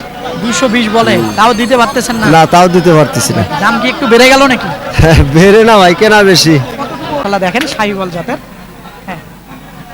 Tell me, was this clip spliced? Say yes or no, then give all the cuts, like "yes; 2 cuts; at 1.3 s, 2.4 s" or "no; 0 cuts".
yes; 1 cut; at 7.2 s